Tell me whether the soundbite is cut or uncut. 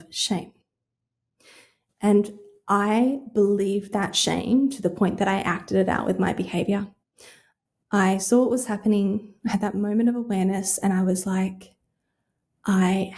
uncut